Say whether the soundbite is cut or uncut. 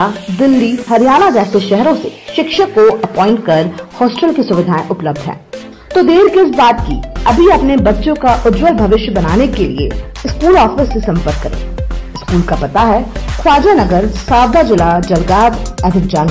uncut